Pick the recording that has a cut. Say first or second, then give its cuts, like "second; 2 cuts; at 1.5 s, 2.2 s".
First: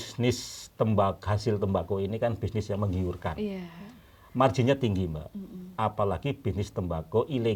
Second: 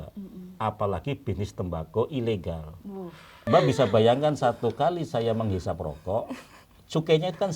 second; 1 cut; at 3.4 s